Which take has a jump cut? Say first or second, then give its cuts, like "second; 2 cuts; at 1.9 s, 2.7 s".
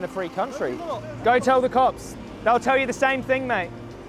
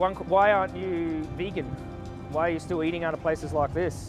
first; 1 cut; at 1.0 s